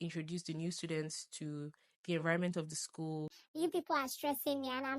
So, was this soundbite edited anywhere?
yes; 1 cut; at 3.4 s

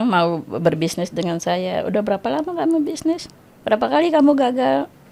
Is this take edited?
no; 0 cuts

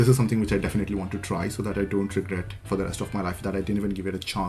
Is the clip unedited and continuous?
yes; 0 cuts

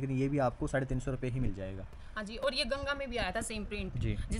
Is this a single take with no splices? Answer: yes; 0 cuts

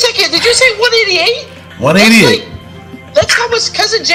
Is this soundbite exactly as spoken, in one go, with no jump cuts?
yes; 0 cuts

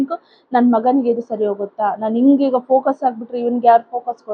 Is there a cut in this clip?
no; 0 cuts

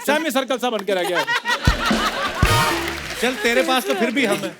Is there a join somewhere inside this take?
yes; 1 cut; at 3.0 s

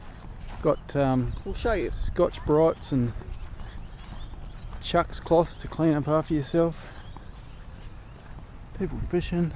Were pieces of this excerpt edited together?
no; 0 cuts

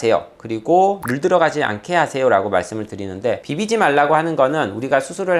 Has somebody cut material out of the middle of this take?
yes; 1 cut; at 3.4 s

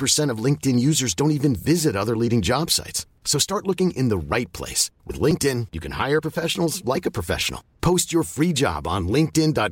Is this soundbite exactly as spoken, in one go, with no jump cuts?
yes; 0 cuts

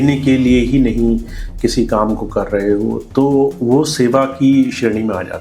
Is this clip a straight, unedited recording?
yes; 0 cuts

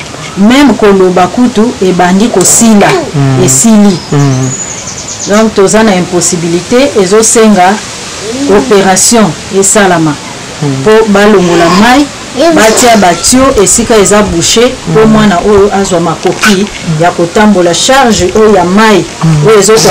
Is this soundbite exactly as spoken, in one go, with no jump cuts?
yes; 0 cuts

